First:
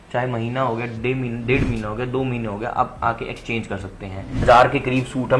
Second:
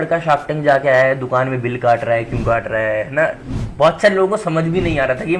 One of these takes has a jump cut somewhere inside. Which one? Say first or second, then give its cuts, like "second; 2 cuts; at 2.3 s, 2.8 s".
first; 1 cut; at 4.4 s